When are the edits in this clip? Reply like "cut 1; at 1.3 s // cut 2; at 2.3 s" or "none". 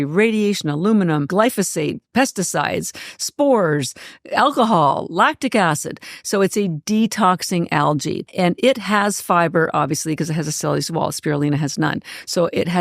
cut 1; at 1.3 s // cut 2; at 8.3 s